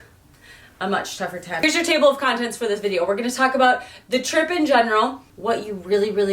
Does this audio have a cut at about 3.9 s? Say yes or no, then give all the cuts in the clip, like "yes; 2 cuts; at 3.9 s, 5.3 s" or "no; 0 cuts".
no; 2 cuts; at 1.6 s, 5.3 s